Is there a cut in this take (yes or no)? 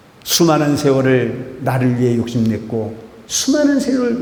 no